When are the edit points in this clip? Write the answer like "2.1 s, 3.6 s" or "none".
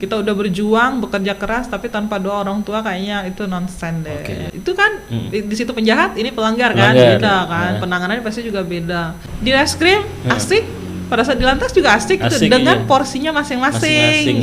4.5 s, 9.2 s